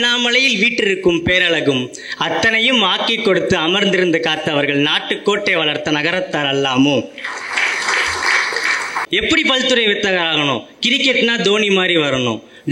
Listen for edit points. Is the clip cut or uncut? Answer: cut